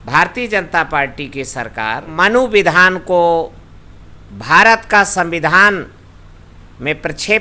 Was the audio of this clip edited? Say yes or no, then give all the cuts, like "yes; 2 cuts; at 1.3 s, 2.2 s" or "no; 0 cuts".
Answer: yes; 1 cut; at 2.1 s